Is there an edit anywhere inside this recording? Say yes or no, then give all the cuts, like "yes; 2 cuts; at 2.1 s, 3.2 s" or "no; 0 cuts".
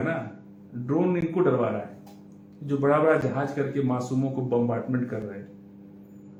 no; 0 cuts